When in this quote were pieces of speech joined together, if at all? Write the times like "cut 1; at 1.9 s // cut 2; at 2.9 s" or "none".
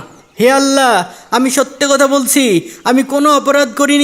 none